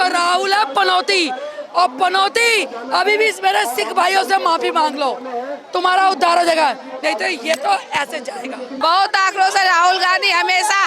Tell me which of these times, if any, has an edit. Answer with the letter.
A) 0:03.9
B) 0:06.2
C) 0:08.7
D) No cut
C